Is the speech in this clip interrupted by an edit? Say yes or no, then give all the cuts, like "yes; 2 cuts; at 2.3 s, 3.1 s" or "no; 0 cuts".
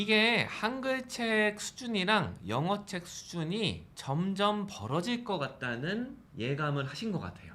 yes; 2 cuts; at 3.9 s, 6.2 s